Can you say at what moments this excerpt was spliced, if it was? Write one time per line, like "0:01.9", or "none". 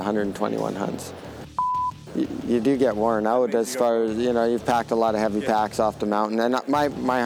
0:01.7